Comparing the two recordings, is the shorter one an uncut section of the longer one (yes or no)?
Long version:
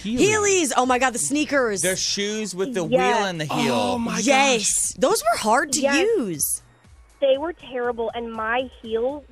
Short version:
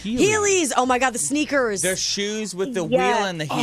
yes